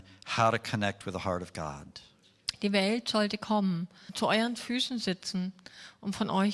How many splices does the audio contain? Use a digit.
1